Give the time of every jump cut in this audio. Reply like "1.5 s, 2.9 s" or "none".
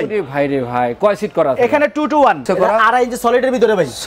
2.4 s